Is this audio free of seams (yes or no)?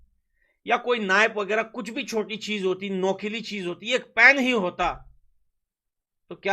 yes